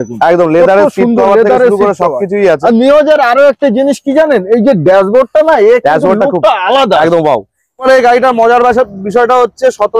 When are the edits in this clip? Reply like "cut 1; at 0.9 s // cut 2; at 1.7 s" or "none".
cut 1; at 7.8 s